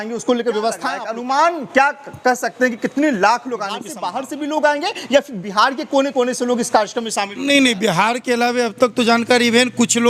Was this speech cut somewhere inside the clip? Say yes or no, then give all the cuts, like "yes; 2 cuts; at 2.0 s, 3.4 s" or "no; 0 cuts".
yes; 2 cuts; at 1.1 s, 3.9 s